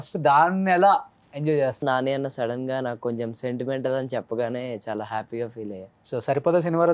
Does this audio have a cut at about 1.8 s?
yes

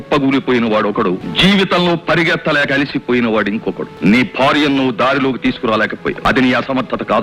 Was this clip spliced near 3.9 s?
yes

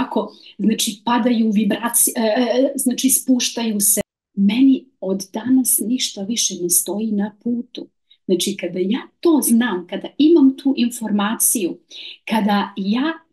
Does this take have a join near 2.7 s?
no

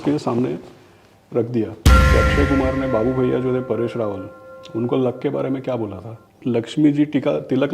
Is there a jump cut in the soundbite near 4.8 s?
no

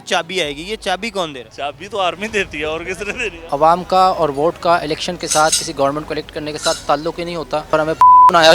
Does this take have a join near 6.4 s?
no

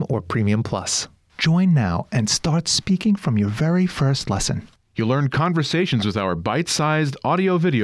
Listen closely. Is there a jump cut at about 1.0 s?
yes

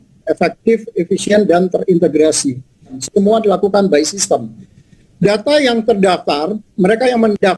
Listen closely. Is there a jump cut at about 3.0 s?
yes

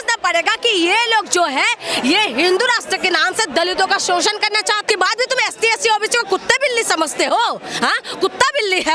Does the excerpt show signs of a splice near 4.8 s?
yes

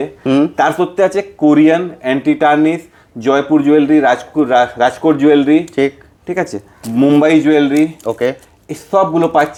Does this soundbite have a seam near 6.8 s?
no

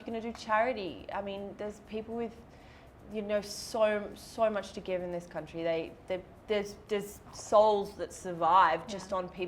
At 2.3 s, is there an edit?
no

